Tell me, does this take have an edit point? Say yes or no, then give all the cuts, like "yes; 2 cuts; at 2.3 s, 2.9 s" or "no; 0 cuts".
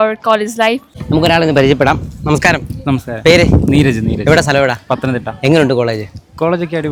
no; 0 cuts